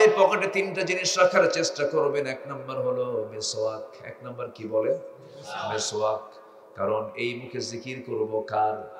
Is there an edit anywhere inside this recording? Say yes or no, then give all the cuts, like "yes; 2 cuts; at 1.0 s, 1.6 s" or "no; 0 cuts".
no; 0 cuts